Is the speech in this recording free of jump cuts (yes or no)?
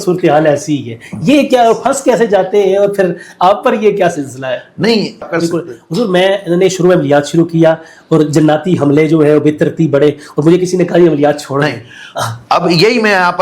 no